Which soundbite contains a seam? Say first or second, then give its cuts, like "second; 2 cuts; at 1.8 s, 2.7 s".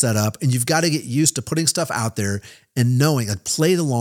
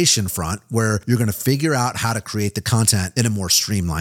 second; 2 cuts; at 1.0 s, 3.1 s